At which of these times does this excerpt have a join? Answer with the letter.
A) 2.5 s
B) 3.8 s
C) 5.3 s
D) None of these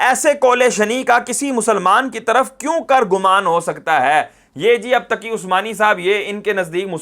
D